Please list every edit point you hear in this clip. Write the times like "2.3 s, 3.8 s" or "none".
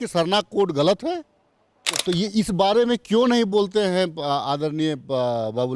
1.9 s